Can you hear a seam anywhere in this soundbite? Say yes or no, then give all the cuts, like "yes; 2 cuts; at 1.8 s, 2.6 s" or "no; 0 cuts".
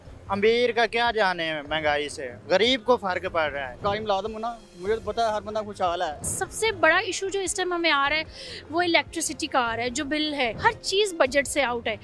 yes; 3 cuts; at 3.7 s, 6.4 s, 10.6 s